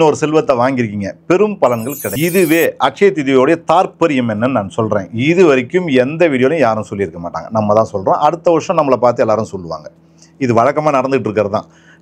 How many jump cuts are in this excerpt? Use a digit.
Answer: 1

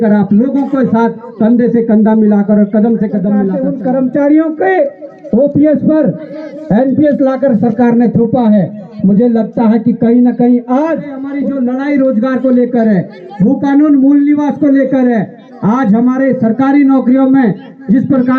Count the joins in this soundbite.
2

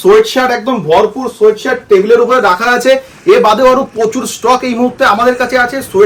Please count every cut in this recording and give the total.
0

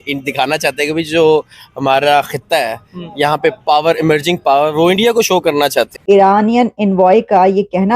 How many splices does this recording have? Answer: 1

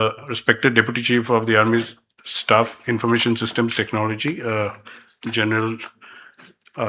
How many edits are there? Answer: 1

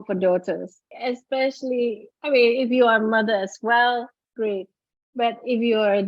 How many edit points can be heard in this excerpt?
1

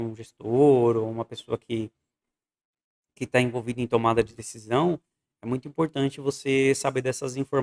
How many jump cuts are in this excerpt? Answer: 0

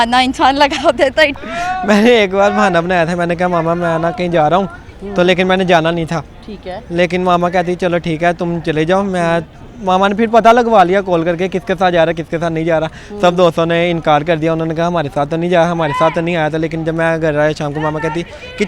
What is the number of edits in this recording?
1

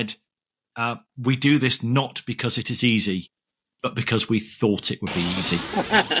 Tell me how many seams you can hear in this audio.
0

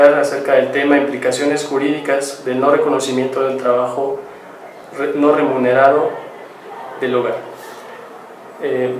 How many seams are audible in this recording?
1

